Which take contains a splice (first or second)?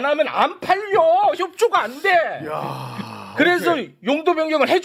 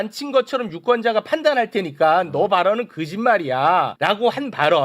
second